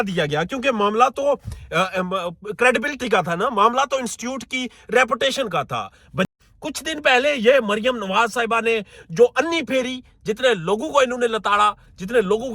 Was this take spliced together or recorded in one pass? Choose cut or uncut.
cut